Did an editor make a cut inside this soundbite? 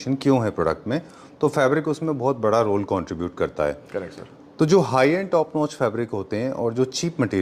no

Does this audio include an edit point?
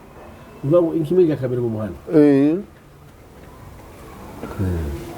no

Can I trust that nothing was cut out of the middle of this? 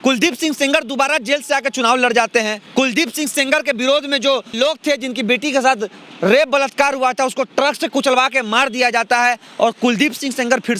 no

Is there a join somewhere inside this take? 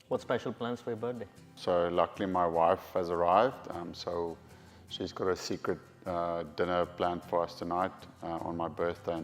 yes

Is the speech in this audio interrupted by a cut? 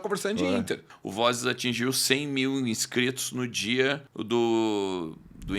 yes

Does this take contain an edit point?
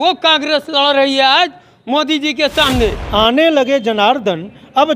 yes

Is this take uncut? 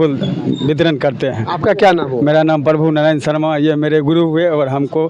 yes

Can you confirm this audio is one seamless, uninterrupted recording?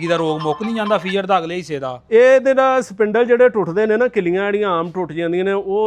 yes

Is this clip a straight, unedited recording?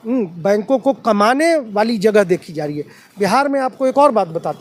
yes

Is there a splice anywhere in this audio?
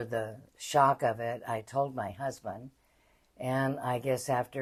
no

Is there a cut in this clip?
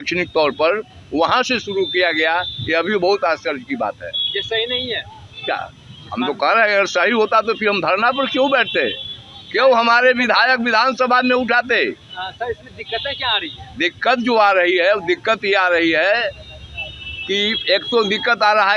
no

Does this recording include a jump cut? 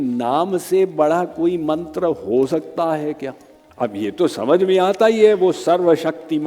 yes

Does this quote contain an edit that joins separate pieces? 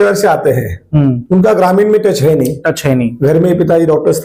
no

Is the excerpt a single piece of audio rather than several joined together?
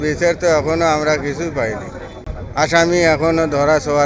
yes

